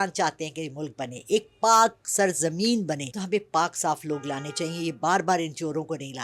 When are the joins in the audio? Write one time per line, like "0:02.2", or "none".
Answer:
0:03.1

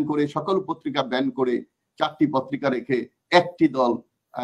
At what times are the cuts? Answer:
none

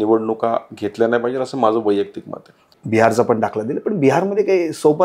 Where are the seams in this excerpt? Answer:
0:02.7

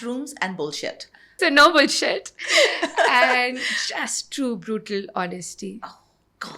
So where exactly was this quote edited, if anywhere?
0:01.3

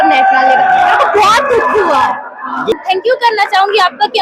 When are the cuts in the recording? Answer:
0:02.8

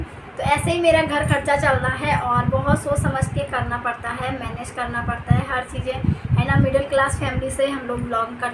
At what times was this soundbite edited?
none

